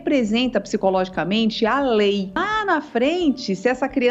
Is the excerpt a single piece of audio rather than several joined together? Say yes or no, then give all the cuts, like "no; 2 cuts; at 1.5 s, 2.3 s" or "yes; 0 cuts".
no; 1 cut; at 2.4 s